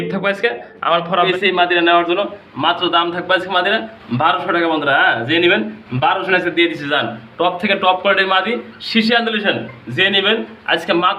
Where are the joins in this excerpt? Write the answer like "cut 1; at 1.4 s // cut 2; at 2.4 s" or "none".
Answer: cut 1; at 1.3 s